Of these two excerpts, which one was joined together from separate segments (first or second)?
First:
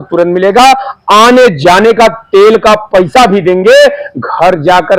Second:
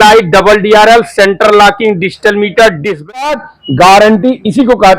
second